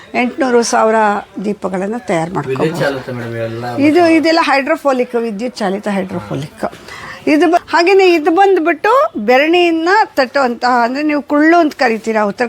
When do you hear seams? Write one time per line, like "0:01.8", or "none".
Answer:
0:07.6